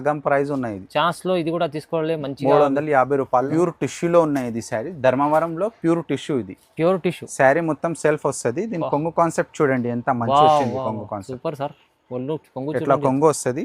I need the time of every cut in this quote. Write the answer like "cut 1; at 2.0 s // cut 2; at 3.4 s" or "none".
cut 1; at 3.5 s